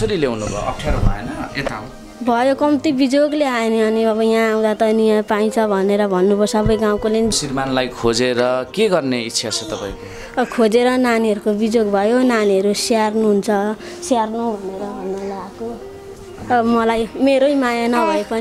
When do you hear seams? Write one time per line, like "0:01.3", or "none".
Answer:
0:07.3